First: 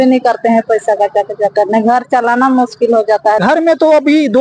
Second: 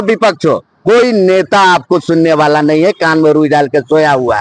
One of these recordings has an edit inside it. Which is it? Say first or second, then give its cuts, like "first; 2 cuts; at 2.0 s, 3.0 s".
first; 1 cut; at 3.4 s